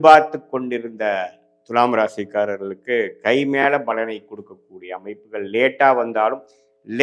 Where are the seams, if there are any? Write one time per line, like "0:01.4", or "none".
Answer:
none